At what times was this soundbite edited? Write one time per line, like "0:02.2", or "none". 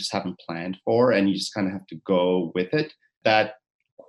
0:03.2